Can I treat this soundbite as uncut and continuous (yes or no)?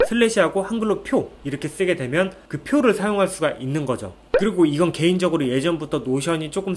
yes